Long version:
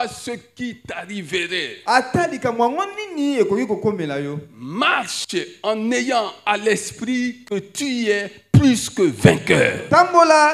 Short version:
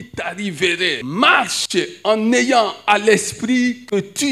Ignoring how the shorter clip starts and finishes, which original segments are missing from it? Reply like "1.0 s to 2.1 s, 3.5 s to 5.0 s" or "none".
1.7 s to 4.5 s